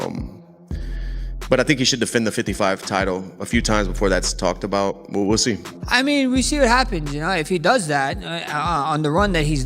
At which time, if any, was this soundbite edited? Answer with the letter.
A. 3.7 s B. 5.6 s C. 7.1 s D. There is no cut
B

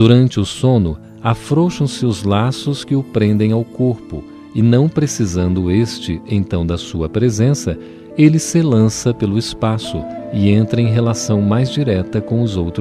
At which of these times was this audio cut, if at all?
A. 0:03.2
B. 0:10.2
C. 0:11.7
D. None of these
B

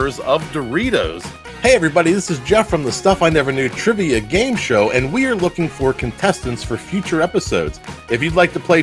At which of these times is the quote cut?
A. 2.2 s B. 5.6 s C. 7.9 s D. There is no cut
D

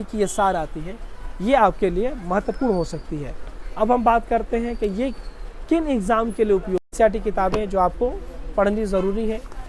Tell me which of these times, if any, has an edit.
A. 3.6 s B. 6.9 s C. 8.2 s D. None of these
B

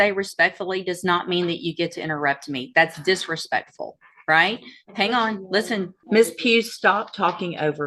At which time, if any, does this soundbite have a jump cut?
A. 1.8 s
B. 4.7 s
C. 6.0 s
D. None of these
C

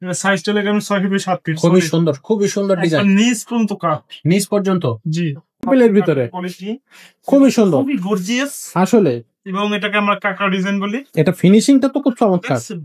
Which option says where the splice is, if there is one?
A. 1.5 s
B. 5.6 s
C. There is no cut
B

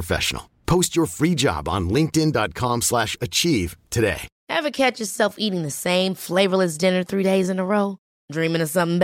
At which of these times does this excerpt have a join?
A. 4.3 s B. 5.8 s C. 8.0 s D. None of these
A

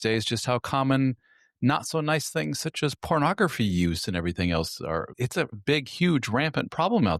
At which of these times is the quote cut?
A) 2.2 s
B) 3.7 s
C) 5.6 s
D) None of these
C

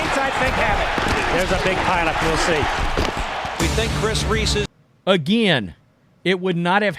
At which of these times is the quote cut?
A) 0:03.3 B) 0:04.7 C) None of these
B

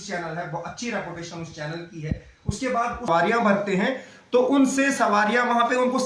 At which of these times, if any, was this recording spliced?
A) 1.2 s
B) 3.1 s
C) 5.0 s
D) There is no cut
B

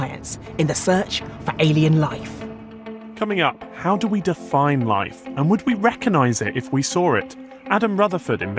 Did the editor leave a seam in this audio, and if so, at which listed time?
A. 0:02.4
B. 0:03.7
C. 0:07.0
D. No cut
C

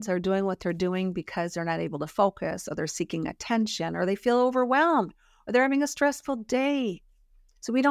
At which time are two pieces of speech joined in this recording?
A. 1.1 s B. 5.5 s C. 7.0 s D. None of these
D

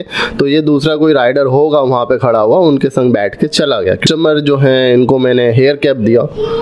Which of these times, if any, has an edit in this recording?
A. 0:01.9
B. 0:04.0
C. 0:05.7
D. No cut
B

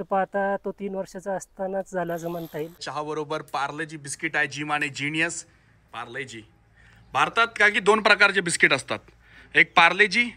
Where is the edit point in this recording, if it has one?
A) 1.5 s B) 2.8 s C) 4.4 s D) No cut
B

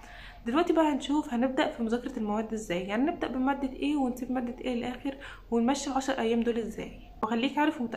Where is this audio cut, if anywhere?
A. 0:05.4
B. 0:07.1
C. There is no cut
B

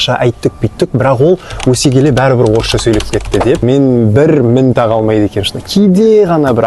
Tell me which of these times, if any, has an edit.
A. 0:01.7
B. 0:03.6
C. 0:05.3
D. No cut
B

